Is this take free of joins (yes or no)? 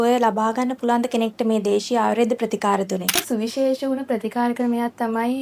no